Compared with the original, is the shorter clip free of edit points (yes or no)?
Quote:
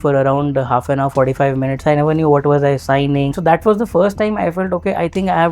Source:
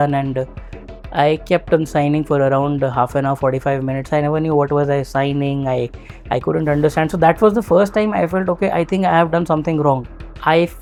no